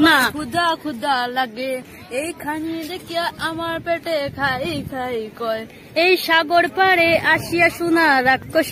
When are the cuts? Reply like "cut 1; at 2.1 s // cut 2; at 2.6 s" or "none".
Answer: none

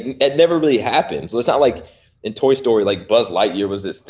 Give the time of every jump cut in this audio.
none

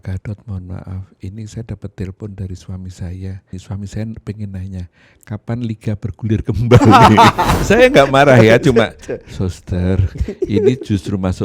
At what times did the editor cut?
cut 1; at 3.6 s // cut 2; at 7.6 s

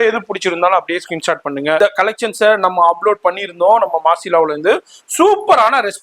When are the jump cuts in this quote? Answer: cut 1; at 1.8 s

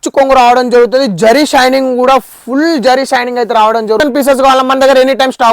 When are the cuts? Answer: cut 1; at 4.0 s

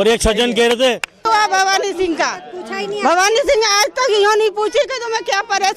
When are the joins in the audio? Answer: cut 1; at 1.3 s

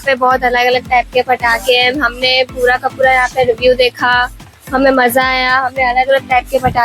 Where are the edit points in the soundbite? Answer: none

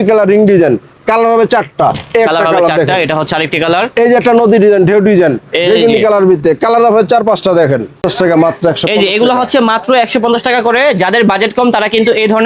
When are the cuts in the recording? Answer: cut 1; at 8.1 s

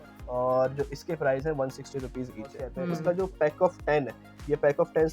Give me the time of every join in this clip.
cut 1; at 2.8 s

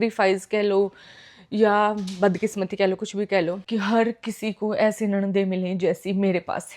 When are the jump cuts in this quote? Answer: cut 1; at 3.6 s

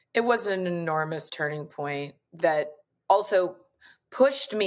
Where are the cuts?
cut 1; at 1.3 s // cut 2; at 2.9 s

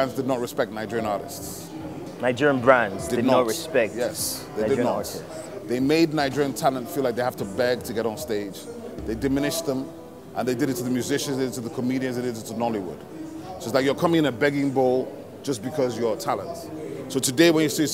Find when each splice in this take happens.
none

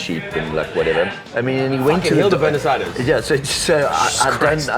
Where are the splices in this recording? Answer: cut 1; at 1.2 s

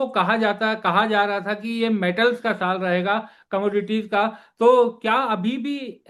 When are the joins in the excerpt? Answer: none

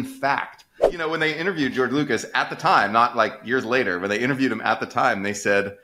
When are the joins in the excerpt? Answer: cut 1; at 1.0 s

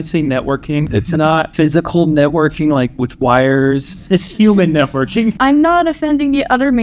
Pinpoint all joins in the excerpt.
cut 1; at 1.0 s // cut 2; at 3.9 s // cut 3; at 5.4 s

